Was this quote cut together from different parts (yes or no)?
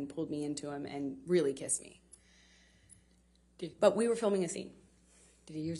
no